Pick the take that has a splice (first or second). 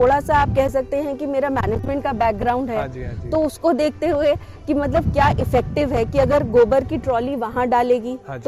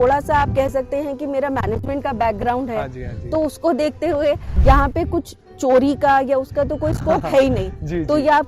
second